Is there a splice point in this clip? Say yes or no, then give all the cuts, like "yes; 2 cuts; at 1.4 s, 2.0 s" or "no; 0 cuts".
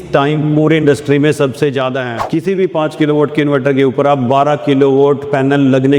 no; 0 cuts